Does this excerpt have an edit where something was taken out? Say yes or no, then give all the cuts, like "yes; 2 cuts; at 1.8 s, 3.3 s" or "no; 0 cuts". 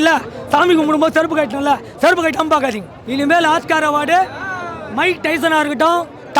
yes; 1 cut; at 2.9 s